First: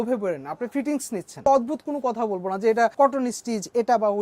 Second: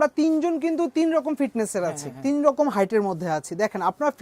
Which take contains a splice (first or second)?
first